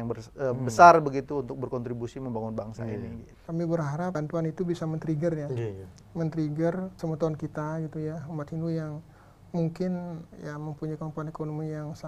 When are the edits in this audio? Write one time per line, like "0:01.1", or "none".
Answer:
0:03.4
0:04.1
0:06.9
0:10.3